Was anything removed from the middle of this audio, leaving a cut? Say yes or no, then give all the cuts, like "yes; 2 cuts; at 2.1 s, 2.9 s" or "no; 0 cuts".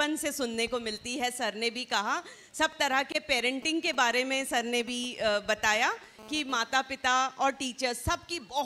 no; 0 cuts